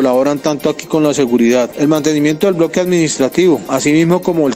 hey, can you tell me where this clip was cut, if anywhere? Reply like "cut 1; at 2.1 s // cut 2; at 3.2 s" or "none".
cut 1; at 1.7 s // cut 2; at 3.7 s